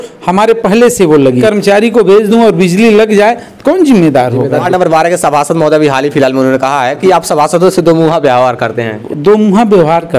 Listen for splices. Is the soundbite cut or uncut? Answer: cut